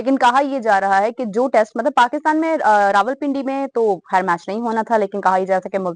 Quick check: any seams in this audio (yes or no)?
no